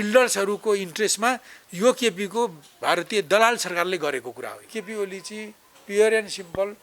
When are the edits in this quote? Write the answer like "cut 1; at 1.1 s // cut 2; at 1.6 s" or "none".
cut 1; at 4.8 s